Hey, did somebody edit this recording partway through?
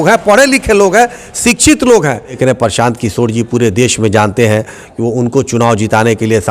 yes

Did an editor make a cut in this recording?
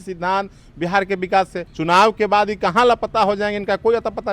yes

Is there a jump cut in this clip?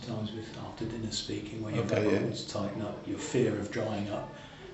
no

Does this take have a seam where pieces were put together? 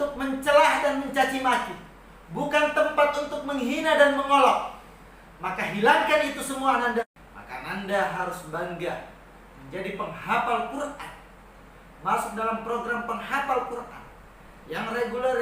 yes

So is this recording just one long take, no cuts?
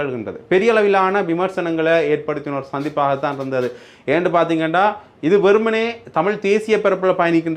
yes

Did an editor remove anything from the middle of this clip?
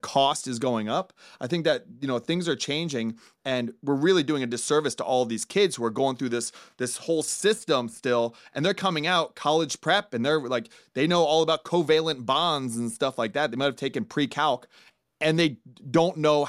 no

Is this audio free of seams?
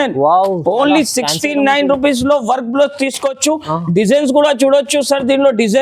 yes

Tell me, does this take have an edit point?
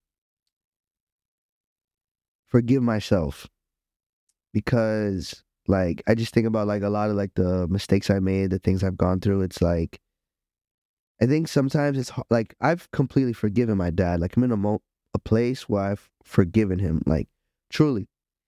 no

